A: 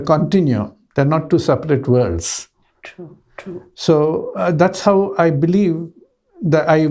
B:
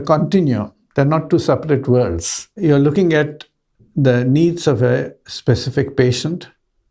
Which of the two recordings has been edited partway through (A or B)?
B